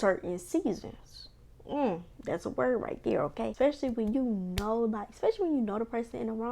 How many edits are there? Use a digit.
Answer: 1